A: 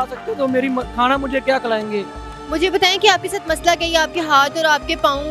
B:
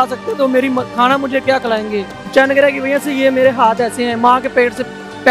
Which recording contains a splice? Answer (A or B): B